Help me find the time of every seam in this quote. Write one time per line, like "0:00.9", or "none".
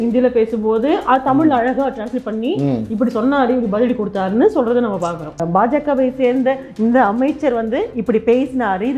0:05.4